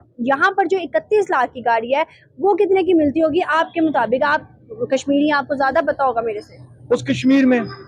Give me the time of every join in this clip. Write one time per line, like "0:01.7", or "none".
none